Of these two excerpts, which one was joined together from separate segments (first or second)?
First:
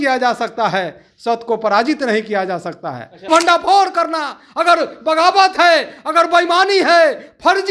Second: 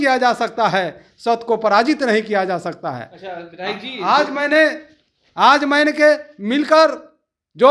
first